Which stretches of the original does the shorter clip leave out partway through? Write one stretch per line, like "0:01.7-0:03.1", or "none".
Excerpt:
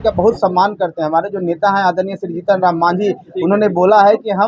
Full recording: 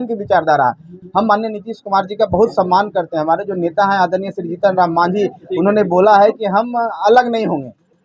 none